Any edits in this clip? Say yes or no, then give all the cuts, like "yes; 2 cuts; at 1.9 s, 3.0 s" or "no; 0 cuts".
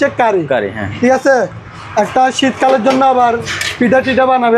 no; 0 cuts